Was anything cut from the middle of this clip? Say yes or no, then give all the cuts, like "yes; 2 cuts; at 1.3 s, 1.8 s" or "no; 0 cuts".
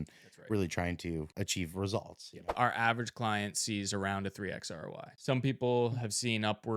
yes; 3 cuts; at 1.3 s, 2.5 s, 5.1 s